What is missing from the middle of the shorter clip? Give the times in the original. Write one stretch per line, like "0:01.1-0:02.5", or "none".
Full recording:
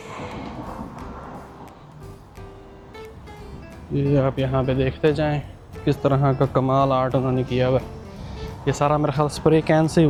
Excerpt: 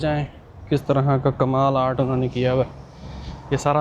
none

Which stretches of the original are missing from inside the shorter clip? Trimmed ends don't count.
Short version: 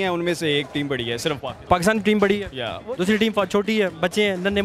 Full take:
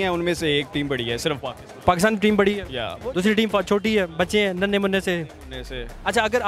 0:01.5-0:01.7

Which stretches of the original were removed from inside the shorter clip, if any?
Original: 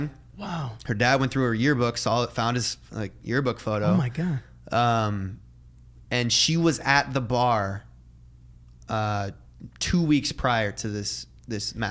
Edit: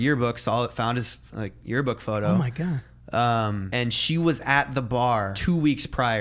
0:05.2-0:06.0
0:07.7-0:09.8

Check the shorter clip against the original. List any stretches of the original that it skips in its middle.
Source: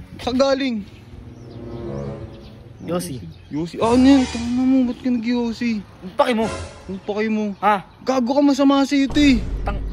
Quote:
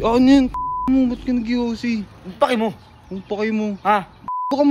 none

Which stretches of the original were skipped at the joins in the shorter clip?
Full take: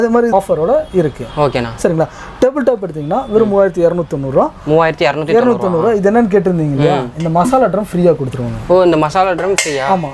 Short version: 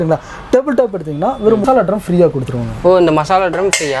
0:03.5-0:07.5

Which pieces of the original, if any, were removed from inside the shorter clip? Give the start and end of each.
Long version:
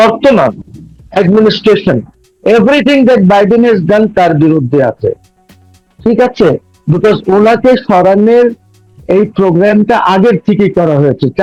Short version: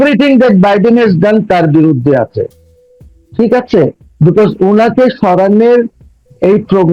none

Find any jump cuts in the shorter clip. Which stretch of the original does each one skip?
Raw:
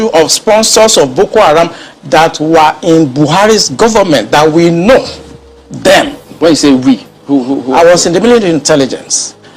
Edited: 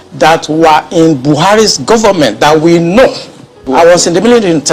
0:05.5-0:07.6

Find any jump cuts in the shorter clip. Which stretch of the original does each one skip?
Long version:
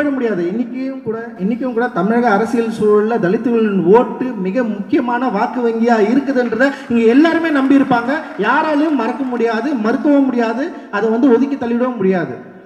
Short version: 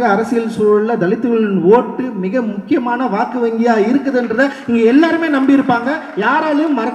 none

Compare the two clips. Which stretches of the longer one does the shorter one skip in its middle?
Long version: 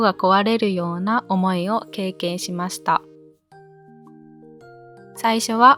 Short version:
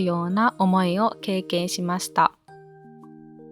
0:03.0-0:03.4

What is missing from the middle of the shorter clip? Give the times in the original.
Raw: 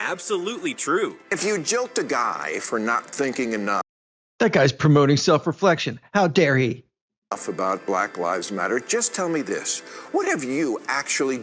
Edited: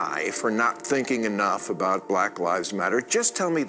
0:03.9-0:07.4

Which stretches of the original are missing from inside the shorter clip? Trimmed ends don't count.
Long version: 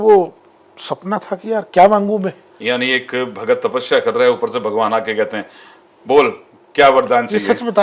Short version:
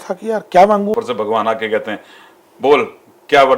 0:02.2-0:04.4

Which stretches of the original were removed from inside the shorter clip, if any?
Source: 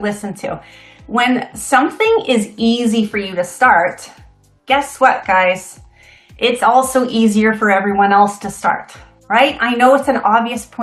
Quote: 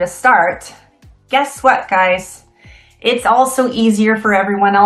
none

